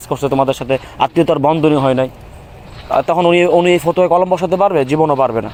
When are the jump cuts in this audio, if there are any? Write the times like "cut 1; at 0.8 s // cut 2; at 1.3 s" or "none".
none